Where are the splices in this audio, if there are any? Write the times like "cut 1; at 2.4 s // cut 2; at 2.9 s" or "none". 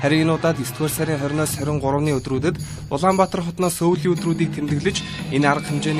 none